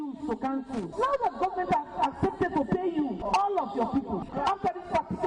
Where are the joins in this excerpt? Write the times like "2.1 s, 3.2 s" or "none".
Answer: 4.3 s